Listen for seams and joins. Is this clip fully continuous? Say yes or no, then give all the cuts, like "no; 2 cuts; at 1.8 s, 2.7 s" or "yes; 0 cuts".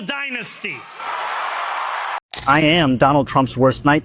yes; 0 cuts